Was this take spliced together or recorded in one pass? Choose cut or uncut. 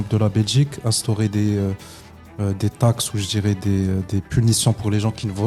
uncut